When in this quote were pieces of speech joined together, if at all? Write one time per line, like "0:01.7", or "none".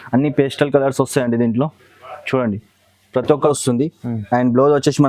0:03.5